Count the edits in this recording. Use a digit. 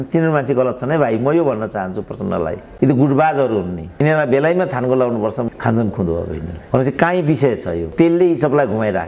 5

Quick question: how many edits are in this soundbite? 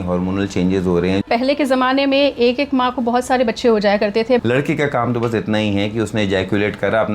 2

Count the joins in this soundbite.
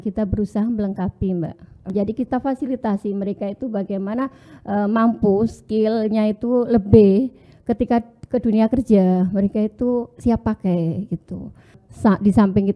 2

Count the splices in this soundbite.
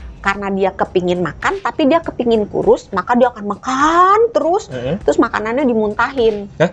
0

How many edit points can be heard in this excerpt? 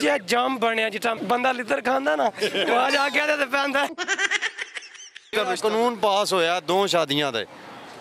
1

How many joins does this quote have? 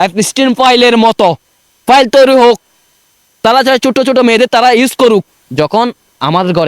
1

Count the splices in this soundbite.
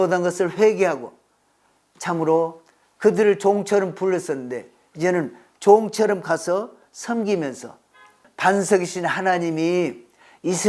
1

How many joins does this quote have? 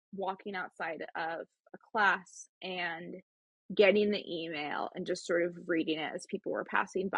0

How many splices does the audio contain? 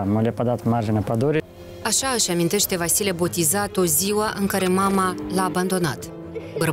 1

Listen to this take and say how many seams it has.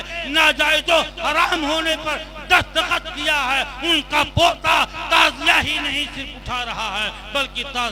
0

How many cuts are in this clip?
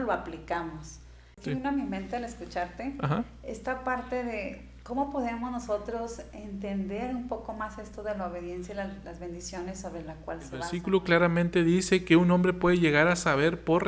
2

